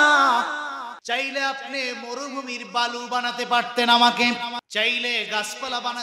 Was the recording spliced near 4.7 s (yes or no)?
yes